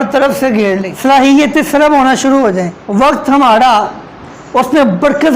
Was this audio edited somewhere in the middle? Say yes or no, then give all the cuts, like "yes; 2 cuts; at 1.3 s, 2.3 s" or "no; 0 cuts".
yes; 2 cuts; at 0.9 s, 2.8 s